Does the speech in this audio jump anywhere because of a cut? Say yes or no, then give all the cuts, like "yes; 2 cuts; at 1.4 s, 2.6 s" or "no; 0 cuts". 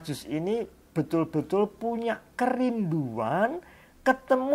no; 0 cuts